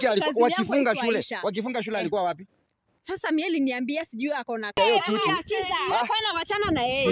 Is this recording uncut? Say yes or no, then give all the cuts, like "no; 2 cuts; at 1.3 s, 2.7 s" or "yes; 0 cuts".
no; 1 cut; at 4.8 s